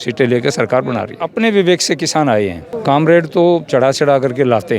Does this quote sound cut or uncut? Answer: cut